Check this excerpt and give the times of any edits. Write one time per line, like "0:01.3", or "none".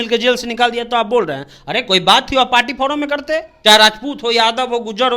0:03.5